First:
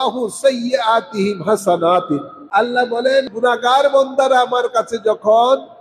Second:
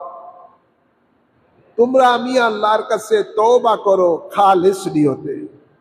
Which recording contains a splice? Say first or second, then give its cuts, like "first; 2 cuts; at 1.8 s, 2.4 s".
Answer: first; 2 cuts; at 2.4 s, 3.3 s